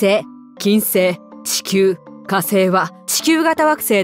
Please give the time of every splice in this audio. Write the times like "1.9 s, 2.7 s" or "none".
3.0 s

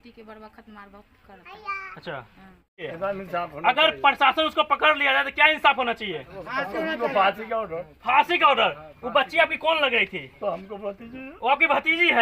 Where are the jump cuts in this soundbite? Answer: 2.8 s

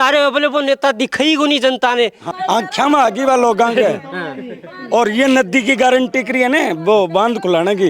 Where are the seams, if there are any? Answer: 2.2 s

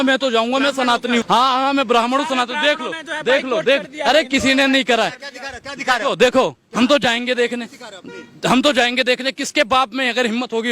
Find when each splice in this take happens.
1.2 s

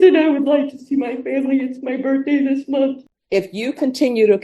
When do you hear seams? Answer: 3.1 s

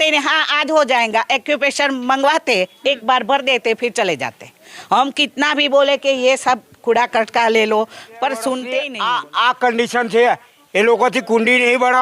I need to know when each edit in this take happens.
8.7 s

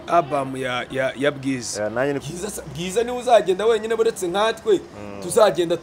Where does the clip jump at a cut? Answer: 2.2 s

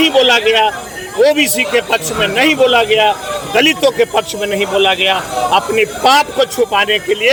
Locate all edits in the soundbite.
none

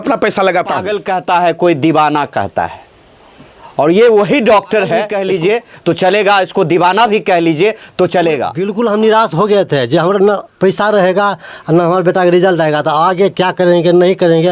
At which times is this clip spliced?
1.0 s, 5.1 s, 8.6 s

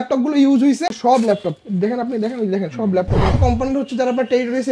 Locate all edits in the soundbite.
1.0 s, 3.4 s

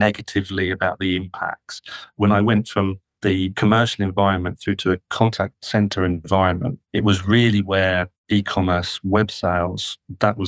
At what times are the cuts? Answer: 2.2 s, 3.1 s, 5.3 s, 6.8 s, 8.1 s

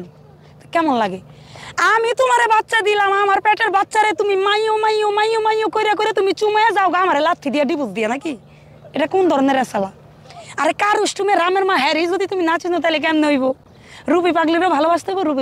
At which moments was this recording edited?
none

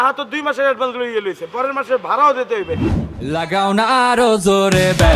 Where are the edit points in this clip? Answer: 3.2 s

